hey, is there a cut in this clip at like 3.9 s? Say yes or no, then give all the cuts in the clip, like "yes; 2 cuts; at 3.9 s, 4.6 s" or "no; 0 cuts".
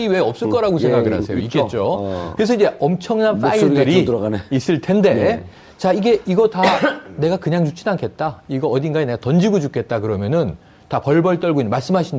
yes; 1 cut; at 3.9 s